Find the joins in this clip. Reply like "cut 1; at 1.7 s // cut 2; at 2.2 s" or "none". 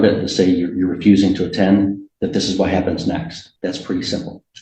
cut 1; at 3.4 s